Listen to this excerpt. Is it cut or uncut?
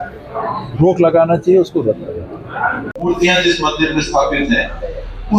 cut